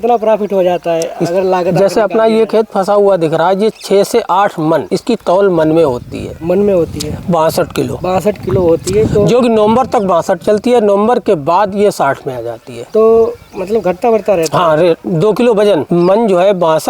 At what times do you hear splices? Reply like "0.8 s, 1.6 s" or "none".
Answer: none